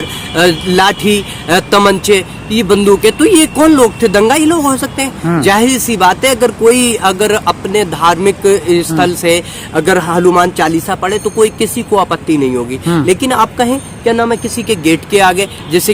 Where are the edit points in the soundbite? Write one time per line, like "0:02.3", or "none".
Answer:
none